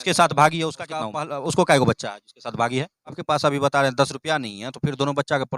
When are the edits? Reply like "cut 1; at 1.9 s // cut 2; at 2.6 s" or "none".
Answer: cut 1; at 1.0 s // cut 2; at 3.2 s